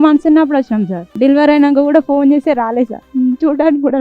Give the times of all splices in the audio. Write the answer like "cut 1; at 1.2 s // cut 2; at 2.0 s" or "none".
cut 1; at 1.0 s // cut 2; at 3.0 s